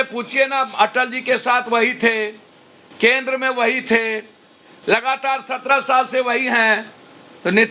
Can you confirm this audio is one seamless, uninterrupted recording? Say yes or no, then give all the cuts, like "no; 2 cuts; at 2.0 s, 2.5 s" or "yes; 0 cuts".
yes; 0 cuts